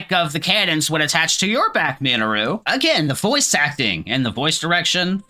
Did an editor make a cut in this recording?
yes; 1 cut; at 2.6 s

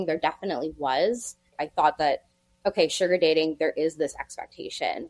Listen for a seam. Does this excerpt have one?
yes; 1 cut; at 1.6 s

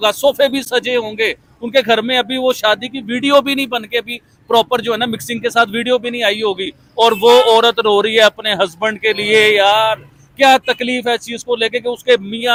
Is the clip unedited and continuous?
yes; 0 cuts

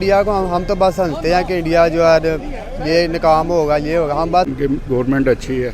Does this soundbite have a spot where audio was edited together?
yes; 1 cut; at 4.5 s

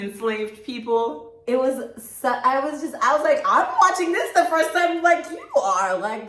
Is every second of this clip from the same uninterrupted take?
yes; 0 cuts

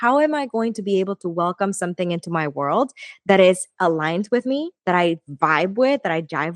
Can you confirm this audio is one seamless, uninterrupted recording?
yes; 0 cuts

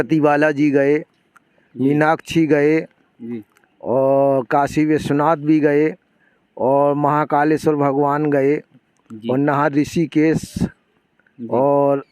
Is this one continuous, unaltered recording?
yes; 0 cuts

